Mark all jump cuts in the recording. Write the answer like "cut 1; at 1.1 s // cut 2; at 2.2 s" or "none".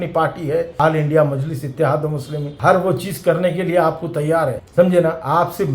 none